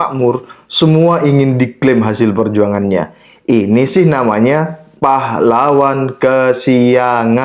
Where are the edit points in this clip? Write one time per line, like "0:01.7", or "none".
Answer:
0:04.8